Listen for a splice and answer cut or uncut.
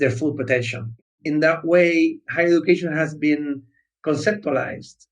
cut